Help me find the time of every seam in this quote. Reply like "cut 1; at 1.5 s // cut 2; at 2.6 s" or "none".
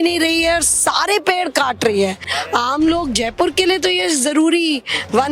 cut 1; at 2.3 s

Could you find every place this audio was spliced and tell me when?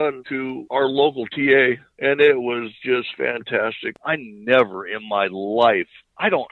cut 1; at 3.9 s

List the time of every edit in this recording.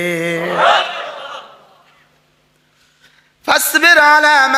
none

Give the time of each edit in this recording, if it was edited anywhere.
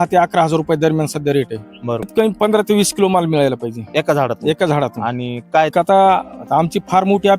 cut 1; at 2.1 s // cut 2; at 5.7 s

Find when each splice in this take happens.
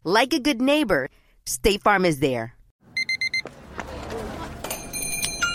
cut 1; at 2.7 s

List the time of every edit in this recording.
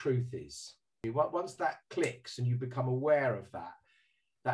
cut 1; at 1.0 s

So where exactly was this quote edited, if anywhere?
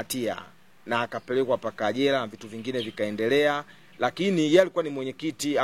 none

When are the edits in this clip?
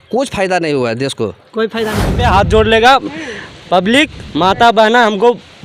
cut 1; at 2.2 s

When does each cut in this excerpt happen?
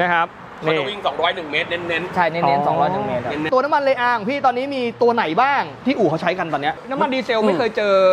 cut 1; at 3.4 s // cut 2; at 6.8 s

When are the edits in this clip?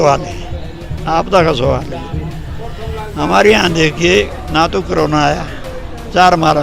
none

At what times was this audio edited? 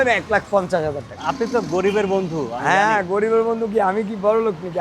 cut 1; at 1.1 s

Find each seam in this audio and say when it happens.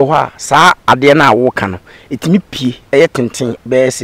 none

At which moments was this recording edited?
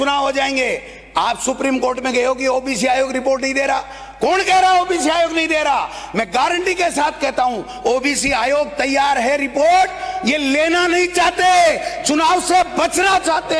none

